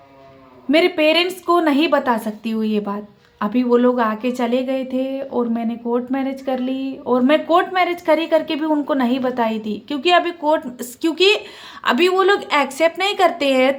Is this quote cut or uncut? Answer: uncut